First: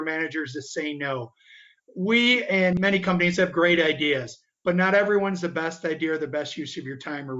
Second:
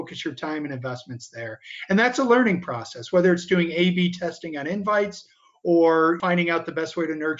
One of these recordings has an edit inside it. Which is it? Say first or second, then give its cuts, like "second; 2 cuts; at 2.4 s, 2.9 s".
first; 1 cut; at 2.8 s